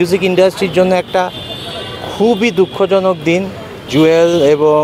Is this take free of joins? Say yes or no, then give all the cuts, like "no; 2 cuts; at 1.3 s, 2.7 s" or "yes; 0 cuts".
no; 1 cut; at 3.9 s